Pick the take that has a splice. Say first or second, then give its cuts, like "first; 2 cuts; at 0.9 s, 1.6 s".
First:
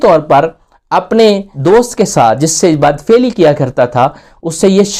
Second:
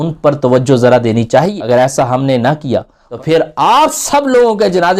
second; 2 cuts; at 1.5 s, 3.0 s